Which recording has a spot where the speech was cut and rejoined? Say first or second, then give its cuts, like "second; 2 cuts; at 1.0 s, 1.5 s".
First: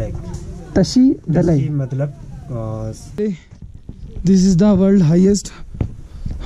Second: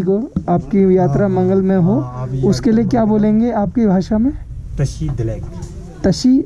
first; 1 cut; at 3.0 s